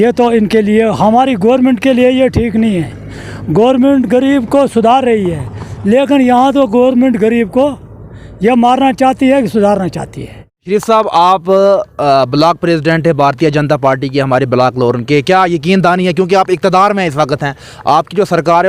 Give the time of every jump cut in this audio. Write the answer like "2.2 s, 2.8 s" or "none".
10.7 s